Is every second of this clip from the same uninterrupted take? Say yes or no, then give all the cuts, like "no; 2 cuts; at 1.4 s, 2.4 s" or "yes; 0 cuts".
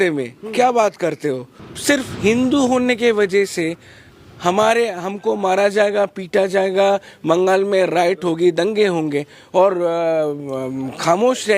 no; 1 cut; at 1.6 s